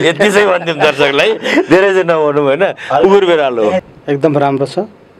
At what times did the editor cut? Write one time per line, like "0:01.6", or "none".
0:03.9